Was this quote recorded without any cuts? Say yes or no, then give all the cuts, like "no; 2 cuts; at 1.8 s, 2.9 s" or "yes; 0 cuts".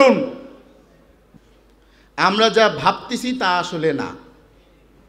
no; 1 cut; at 1.2 s